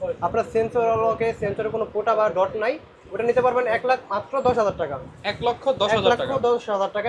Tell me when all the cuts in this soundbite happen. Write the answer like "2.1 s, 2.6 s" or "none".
none